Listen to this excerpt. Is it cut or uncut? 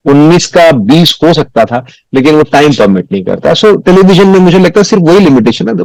uncut